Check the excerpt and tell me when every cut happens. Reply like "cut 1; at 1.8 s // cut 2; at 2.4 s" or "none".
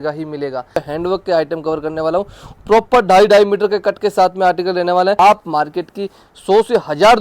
cut 1; at 0.8 s // cut 2; at 5.2 s

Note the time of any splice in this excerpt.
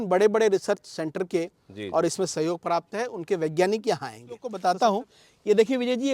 cut 1; at 4.5 s

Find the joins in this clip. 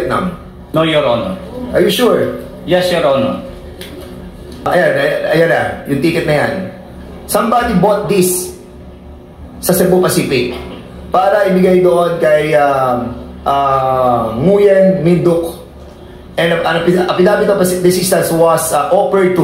cut 1; at 4.7 s

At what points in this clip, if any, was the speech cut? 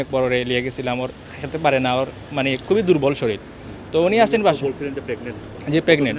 none

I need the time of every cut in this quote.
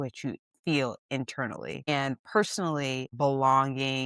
cut 1; at 1.9 s // cut 2; at 3.1 s

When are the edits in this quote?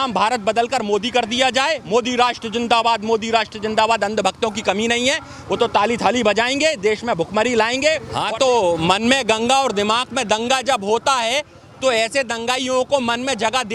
cut 1; at 8.1 s

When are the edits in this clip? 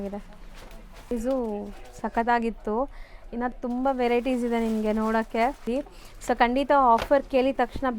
cut 1; at 1.1 s // cut 2; at 5.7 s

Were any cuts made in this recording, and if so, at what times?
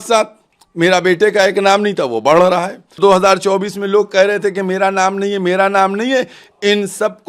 cut 1; at 3.0 s

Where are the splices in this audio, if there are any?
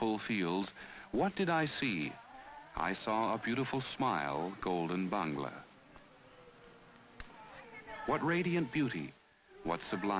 cut 1; at 5.3 s

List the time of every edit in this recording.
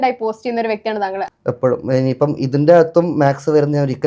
cut 1; at 1.3 s

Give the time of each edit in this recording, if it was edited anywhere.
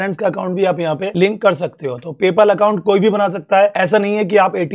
cut 1; at 1.1 s // cut 2; at 3.7 s

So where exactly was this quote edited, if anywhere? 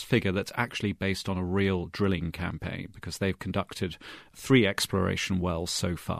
none

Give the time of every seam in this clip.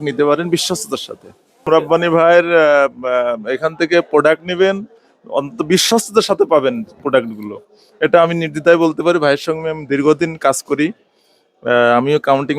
cut 1; at 1.7 s

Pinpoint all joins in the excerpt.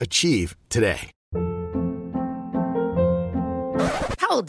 cut 1; at 1.1 s

